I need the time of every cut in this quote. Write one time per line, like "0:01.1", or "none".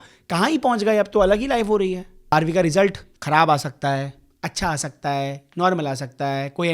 0:02.1
0:03.1